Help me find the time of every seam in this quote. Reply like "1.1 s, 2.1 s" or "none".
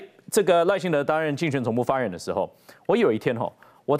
none